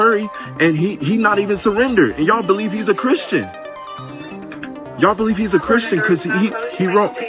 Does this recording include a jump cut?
no; 0 cuts

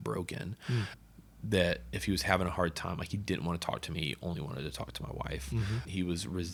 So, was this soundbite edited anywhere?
no; 0 cuts

